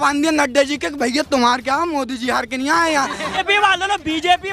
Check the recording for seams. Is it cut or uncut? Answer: cut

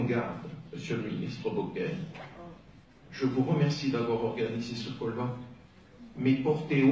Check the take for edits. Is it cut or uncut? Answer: uncut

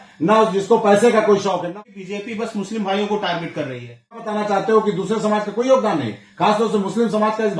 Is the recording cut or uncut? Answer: cut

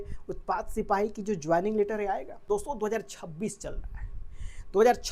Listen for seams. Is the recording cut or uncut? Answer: cut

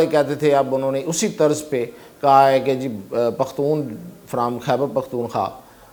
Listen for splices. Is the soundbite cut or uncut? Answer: uncut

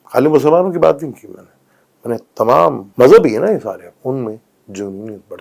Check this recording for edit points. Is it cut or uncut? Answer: cut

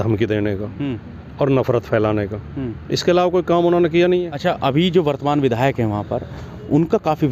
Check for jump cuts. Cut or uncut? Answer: cut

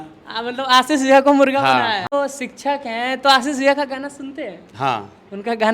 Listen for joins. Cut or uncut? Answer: cut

